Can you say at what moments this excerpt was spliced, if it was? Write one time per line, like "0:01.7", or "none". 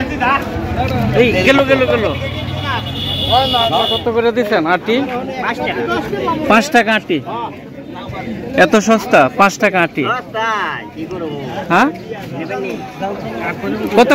0:03.8
0:12.9